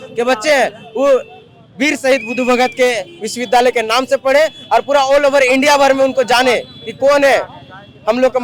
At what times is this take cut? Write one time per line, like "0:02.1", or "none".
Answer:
none